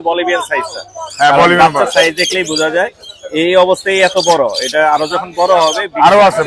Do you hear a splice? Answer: no; 0 cuts

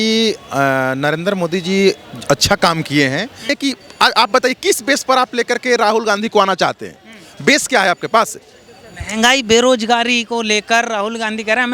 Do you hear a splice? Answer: yes; 1 cut; at 3.5 s

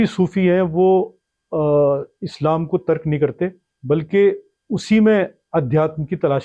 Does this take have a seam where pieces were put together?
yes; 1 cut; at 3.7 s

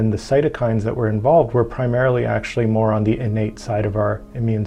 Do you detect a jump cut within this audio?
no; 0 cuts

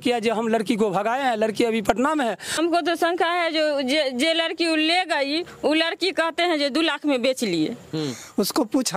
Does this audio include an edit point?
yes; 2 cuts; at 2.6 s, 7.9 s

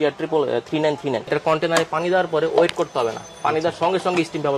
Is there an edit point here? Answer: yes; 1 cut; at 1.3 s

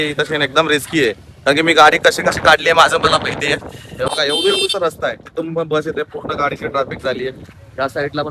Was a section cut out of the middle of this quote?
no; 0 cuts

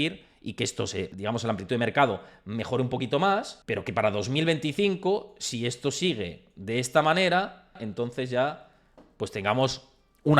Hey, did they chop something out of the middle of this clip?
yes; 3 cuts; at 1.1 s, 3.5 s, 7.8 s

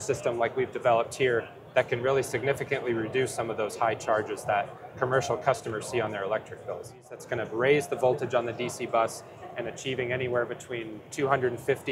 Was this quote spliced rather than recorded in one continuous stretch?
yes; 1 cut; at 7.2 s

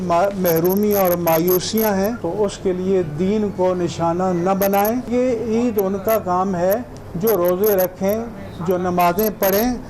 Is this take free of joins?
no; 2 cuts; at 2.2 s, 5.1 s

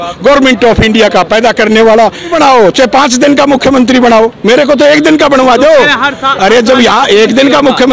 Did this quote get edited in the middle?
yes; 1 cut; at 2.3 s

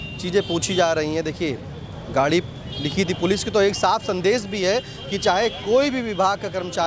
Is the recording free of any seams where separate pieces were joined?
yes; 0 cuts

